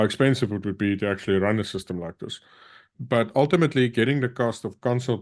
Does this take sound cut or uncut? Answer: cut